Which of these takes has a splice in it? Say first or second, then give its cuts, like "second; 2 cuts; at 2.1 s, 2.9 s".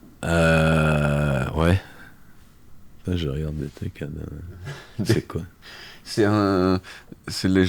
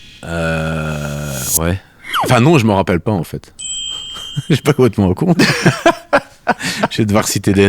second; 1 cut; at 2.2 s